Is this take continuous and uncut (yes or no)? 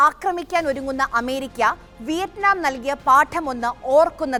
yes